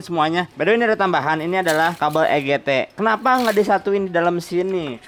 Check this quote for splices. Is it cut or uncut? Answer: uncut